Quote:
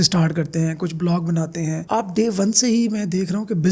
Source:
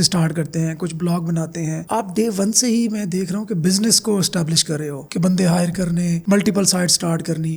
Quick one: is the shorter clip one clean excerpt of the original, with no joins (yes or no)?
yes